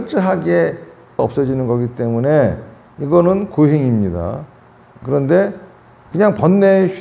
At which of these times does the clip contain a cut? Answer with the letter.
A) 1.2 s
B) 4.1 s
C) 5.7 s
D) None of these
A